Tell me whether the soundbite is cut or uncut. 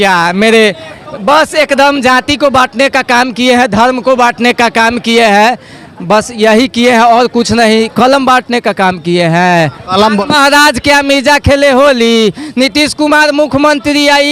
uncut